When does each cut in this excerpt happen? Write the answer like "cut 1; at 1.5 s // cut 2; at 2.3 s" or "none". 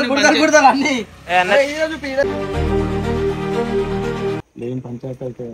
cut 1; at 4.4 s